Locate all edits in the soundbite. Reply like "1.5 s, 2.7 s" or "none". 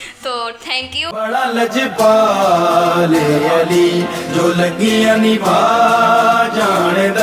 1.1 s

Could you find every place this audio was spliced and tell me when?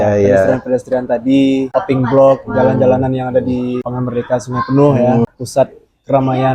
1.7 s, 3.9 s, 5.3 s

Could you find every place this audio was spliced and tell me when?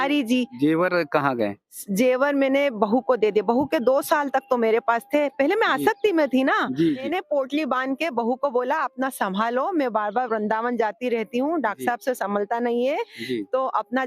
7.0 s

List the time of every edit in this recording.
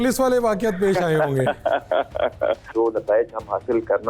2.7 s

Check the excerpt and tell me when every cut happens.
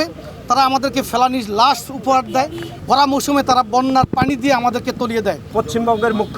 2.7 s, 5.5 s

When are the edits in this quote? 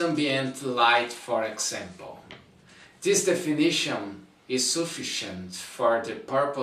2.4 s

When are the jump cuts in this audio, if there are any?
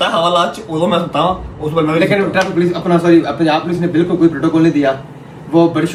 none

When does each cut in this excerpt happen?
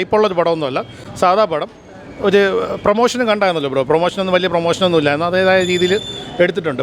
none

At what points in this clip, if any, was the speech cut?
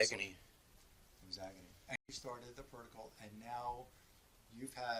1.9 s

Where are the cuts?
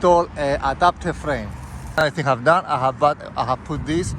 2.0 s

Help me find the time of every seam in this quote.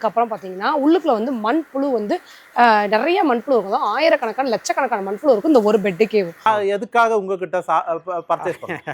6.4 s

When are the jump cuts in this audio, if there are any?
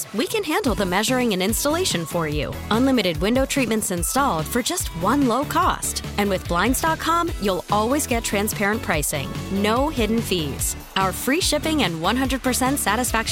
none

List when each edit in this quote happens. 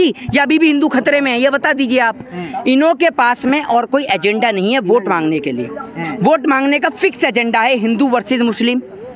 none

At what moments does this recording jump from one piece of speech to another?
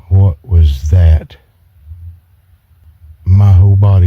2.8 s

